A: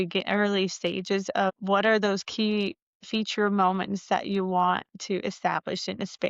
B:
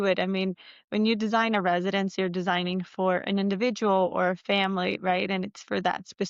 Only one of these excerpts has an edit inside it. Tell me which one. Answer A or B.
A